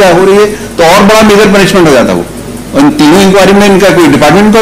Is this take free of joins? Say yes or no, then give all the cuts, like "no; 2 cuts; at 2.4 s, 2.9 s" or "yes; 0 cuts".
yes; 0 cuts